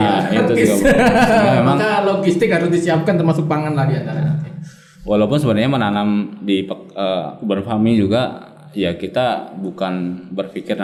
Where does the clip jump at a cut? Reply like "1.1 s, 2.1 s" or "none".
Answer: none